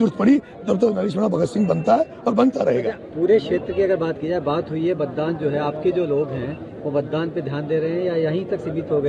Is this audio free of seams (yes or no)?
yes